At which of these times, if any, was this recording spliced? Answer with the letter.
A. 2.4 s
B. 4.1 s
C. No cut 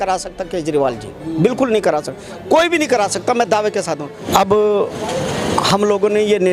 B